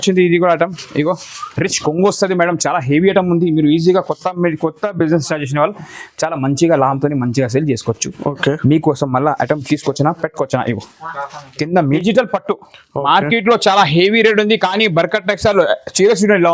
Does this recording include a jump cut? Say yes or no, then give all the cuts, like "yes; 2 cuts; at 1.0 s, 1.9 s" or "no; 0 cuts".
yes; 1 cut; at 11.9 s